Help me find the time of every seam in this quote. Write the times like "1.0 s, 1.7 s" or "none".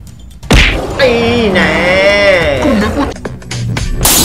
3.1 s